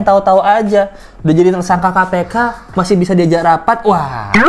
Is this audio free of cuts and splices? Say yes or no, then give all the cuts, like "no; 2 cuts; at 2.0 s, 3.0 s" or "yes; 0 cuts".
yes; 0 cuts